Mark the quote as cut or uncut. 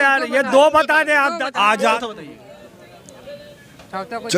cut